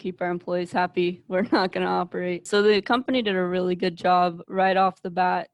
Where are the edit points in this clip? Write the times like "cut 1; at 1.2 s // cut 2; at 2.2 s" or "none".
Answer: cut 1; at 2.5 s